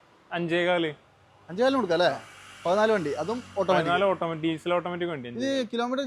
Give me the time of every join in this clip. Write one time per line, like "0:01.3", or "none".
none

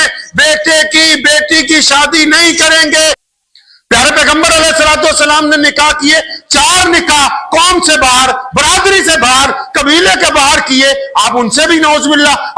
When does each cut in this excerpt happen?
0:03.2

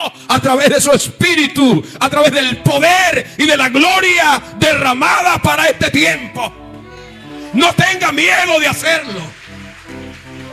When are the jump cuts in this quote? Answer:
none

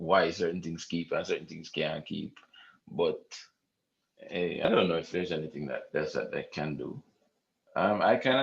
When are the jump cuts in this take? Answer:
0:04.6

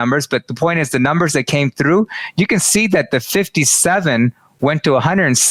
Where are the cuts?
none

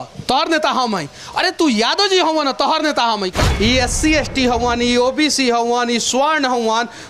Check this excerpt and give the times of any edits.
0:03.4

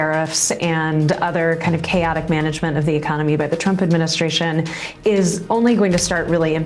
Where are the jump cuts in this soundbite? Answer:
none

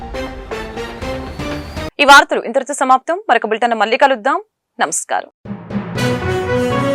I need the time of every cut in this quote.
none

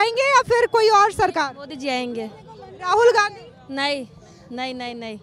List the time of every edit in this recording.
none

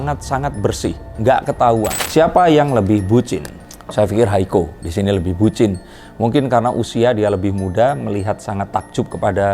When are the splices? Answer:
0:02.0

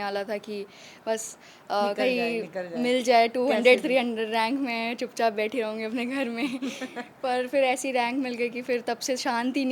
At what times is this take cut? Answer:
none

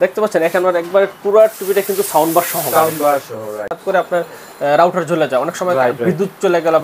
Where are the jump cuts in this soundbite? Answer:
0:03.8

